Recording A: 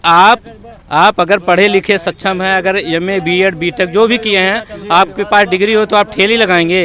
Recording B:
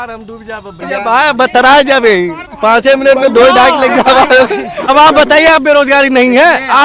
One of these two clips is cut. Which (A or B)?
B